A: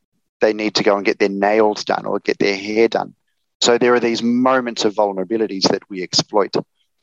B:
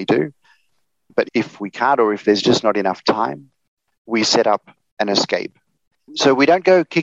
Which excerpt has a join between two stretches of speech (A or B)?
B